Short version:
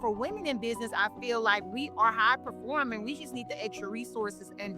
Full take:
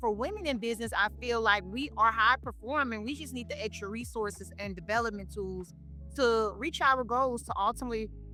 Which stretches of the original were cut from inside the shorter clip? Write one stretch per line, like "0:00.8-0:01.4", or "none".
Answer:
none

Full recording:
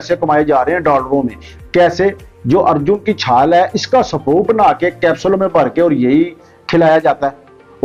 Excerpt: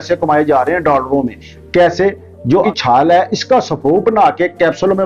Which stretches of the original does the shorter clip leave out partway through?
0:02.6-0:03.1

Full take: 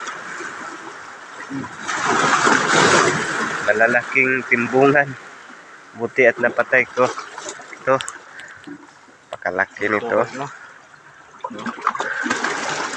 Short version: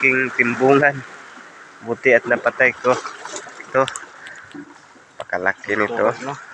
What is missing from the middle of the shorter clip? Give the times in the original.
none

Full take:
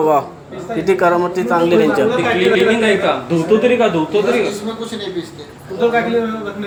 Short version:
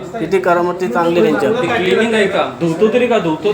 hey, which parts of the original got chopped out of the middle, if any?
0:02.4-0:02.6

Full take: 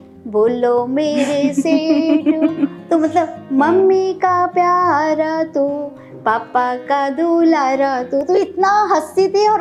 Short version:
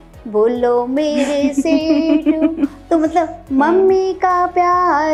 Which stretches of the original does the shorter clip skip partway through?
none

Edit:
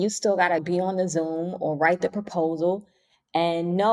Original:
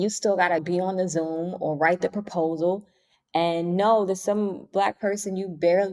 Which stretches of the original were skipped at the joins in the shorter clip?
none

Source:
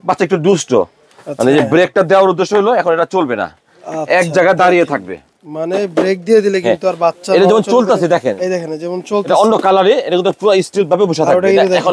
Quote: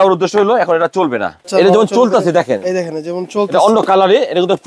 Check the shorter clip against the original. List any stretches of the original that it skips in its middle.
0:03.6-0:07.2

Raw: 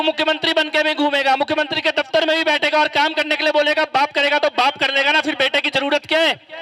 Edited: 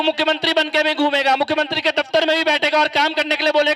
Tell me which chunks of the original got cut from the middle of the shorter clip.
none

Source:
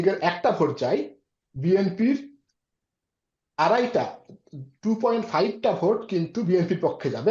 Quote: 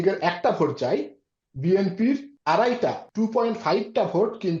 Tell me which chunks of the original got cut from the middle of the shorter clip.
0:02.3-0:03.4
0:04.2-0:04.7

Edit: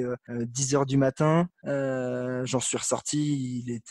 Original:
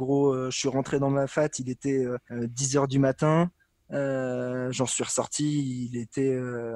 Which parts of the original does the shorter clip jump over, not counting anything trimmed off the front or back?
0:03.6-0:03.8

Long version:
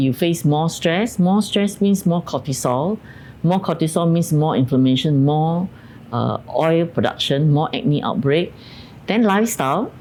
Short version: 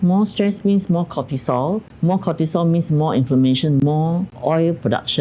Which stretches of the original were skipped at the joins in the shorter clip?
0:03.1-0:03.3
0:05.7-0:06.5

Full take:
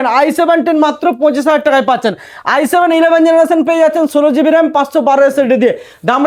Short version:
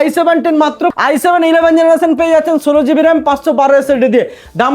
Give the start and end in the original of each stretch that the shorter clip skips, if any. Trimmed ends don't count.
0:01.2-0:02.4

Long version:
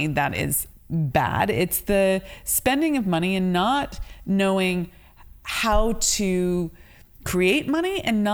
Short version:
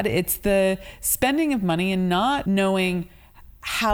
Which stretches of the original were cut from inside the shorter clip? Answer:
0:03.9-0:04.2

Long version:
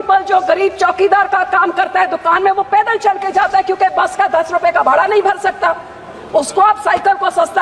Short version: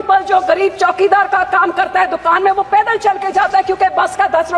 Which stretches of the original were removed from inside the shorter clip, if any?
none

